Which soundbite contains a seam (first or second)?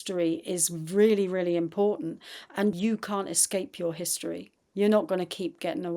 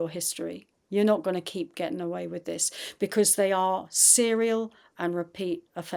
first